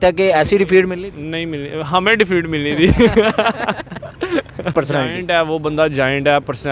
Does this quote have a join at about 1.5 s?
no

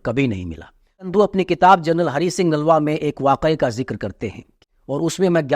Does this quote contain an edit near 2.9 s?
no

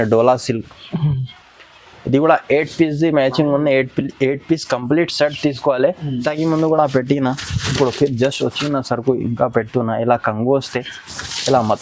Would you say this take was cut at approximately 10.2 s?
no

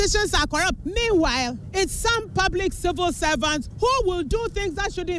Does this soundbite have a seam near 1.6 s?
yes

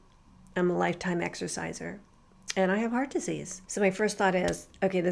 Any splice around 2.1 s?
no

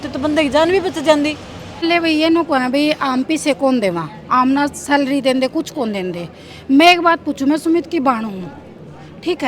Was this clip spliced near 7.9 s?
no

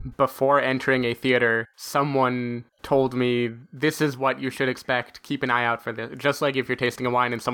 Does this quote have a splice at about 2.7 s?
yes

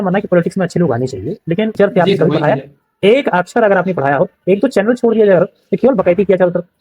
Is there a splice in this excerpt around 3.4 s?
no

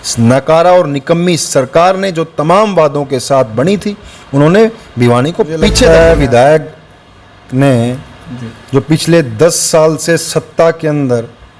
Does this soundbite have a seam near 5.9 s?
yes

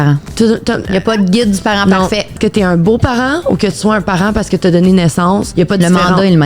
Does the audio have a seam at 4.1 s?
no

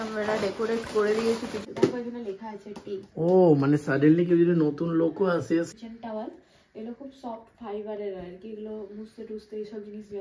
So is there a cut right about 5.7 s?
yes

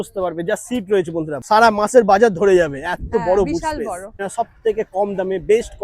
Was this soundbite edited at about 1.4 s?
yes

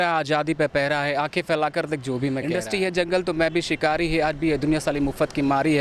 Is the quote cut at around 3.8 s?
no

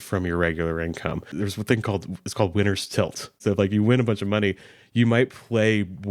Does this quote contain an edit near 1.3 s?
yes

